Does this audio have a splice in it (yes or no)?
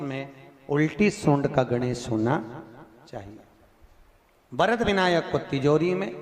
no